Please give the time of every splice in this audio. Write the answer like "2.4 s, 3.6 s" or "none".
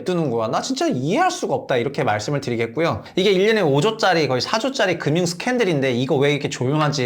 3.1 s